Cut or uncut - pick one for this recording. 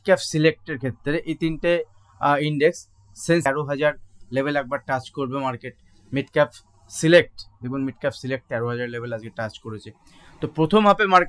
cut